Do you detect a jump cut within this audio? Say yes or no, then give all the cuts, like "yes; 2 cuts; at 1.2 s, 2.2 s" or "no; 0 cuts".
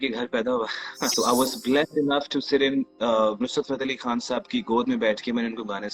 yes; 1 cut; at 1.1 s